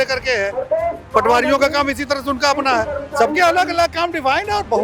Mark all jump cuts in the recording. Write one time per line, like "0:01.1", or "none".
none